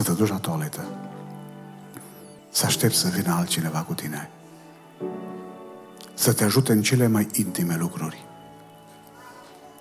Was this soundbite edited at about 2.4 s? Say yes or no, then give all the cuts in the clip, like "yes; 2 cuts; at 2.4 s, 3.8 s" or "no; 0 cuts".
yes; 1 cut; at 2.4 s